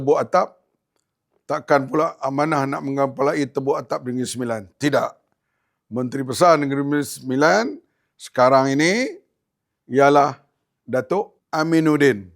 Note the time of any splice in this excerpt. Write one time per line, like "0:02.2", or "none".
0:11.4